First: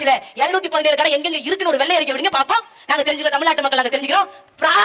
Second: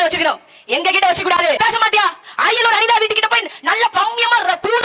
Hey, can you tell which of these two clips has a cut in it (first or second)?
second